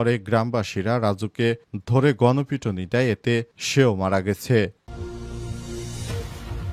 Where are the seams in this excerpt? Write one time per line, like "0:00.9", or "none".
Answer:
0:04.8